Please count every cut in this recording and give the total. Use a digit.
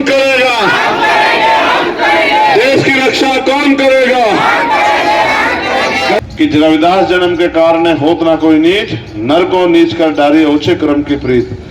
1